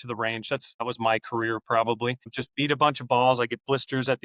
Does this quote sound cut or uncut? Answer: cut